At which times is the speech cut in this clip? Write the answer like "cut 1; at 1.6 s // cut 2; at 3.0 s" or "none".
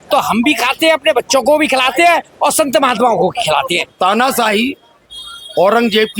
cut 1; at 3.8 s